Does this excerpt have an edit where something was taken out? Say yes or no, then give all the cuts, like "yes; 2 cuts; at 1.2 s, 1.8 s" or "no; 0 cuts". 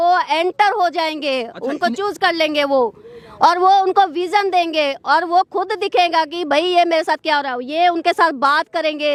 no; 0 cuts